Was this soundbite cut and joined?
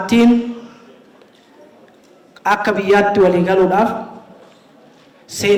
no; 0 cuts

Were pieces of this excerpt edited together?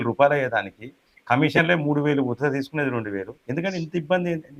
yes; 1 cut; at 3.4 s

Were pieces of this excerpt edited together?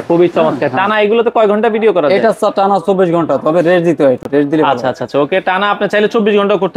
no; 0 cuts

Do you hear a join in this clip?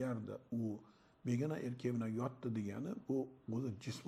no; 0 cuts

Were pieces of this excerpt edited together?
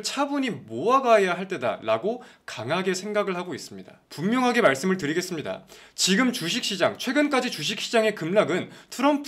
no; 0 cuts

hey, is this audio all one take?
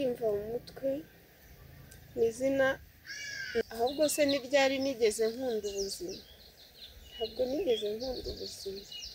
no; 1 cut; at 3.6 s

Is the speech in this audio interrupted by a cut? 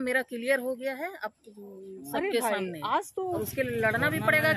yes; 1 cut; at 3.4 s

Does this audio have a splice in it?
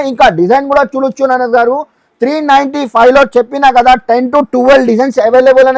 no; 0 cuts

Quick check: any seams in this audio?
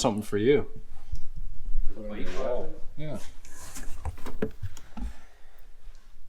no; 0 cuts

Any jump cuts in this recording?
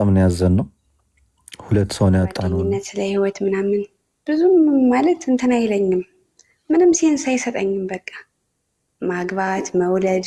yes; 1 cut; at 2.5 s

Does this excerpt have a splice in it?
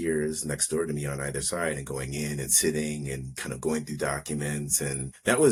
no; 0 cuts

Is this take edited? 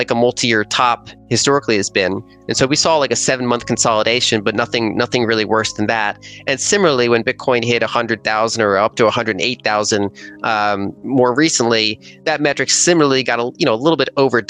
no; 0 cuts

